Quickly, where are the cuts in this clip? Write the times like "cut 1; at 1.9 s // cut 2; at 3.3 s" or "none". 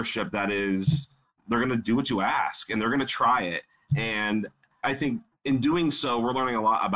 cut 1; at 1.4 s // cut 2; at 4.9 s